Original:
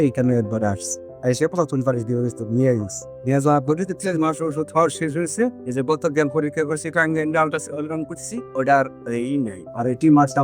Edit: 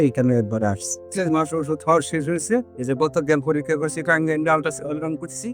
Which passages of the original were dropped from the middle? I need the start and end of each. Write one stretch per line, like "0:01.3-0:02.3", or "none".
0:01.0-0:03.9